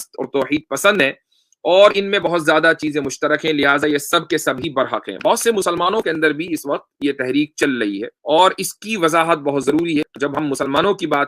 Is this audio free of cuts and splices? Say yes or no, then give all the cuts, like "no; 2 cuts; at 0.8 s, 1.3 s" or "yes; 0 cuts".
no; 2 cuts; at 8.1 s, 10.1 s